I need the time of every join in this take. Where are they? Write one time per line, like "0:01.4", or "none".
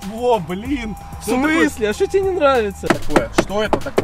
0:02.8